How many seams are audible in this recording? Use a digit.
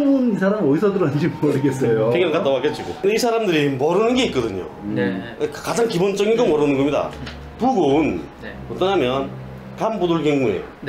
1